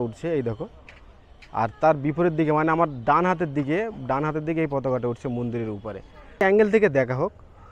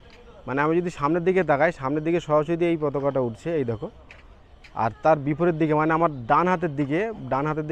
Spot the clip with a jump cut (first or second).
first